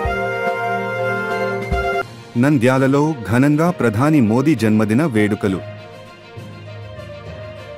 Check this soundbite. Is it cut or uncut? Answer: cut